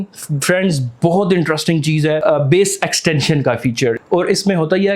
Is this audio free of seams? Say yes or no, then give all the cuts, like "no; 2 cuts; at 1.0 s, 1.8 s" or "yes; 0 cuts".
no; 2 cuts; at 2.2 s, 4.0 s